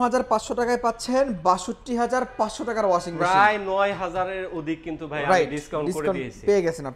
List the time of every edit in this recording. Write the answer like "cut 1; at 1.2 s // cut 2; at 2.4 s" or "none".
none